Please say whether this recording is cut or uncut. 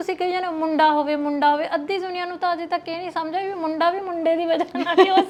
uncut